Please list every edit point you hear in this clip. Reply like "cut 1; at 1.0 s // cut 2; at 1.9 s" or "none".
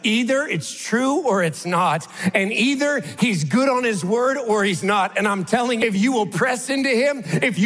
cut 1; at 5.8 s